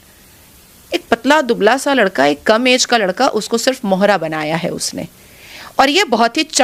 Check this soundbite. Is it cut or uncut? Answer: uncut